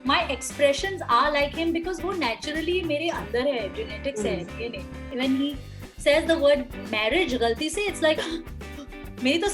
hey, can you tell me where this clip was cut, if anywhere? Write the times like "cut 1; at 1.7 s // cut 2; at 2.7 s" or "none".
cut 1; at 5.1 s